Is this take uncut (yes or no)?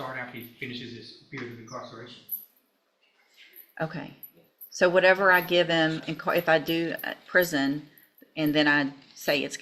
yes